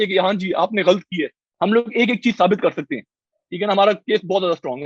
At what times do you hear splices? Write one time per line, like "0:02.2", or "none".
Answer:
0:01.4